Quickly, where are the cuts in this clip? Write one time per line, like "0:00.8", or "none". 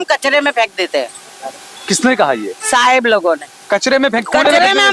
none